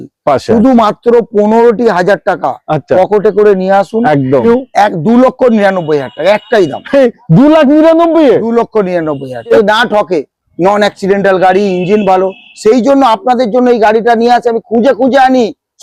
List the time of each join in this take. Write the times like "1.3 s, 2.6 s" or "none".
4.4 s, 9.5 s